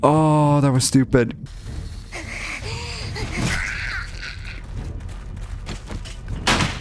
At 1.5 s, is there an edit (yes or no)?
yes